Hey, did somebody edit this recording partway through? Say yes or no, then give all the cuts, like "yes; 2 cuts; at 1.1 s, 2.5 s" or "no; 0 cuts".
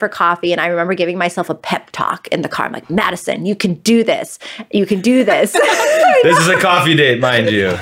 no; 0 cuts